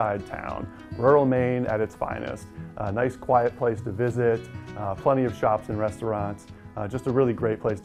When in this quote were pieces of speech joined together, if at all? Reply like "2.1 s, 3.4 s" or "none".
none